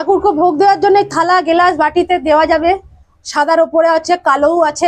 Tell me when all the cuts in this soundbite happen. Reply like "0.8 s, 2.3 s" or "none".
none

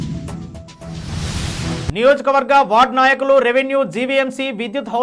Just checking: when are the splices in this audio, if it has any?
1.9 s

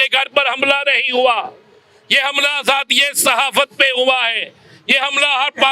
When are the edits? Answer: none

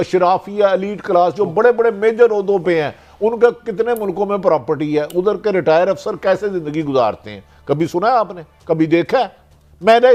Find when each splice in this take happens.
none

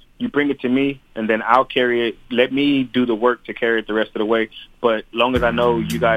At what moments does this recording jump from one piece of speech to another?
none

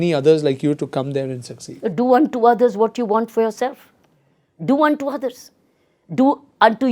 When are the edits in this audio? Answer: none

